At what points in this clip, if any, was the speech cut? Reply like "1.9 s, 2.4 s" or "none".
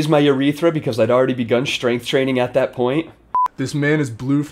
3.2 s